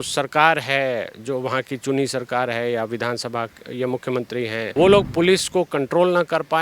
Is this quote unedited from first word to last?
no; 1 cut; at 4.7 s

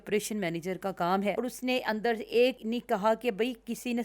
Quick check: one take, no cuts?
no; 2 cuts; at 1.3 s, 2.6 s

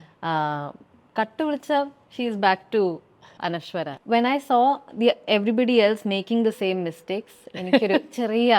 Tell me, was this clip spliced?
yes; 1 cut; at 4.0 s

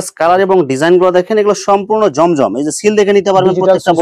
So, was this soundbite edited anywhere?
no; 0 cuts

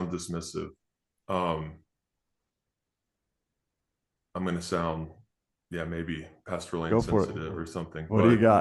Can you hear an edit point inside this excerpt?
no; 0 cuts

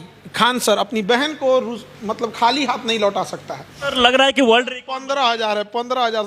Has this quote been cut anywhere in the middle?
yes; 1 cut; at 3.9 s

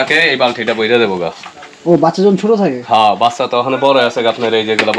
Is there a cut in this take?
no; 0 cuts

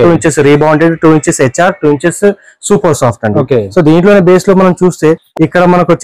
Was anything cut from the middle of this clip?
no; 0 cuts

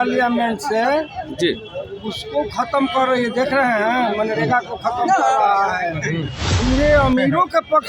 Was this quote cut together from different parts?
yes; 1 cut; at 6.5 s

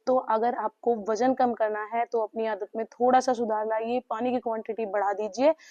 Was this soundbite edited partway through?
no; 0 cuts

